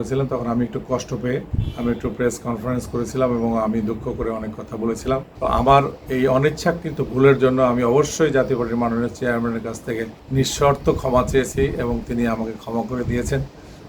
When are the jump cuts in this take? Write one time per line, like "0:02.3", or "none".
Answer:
0:01.6
0:05.3
0:10.2